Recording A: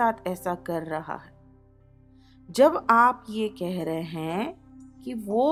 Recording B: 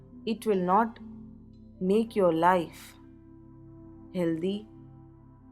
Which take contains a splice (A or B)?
B